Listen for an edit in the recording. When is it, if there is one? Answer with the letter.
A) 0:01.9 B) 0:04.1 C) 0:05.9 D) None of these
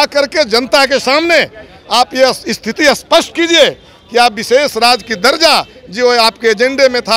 D